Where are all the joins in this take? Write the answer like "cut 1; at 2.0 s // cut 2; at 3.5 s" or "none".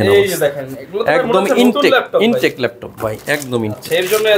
none